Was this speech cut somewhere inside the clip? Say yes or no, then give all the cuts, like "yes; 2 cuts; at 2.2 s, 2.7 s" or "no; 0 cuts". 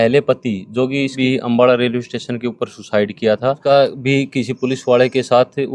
yes; 2 cuts; at 1.2 s, 3.6 s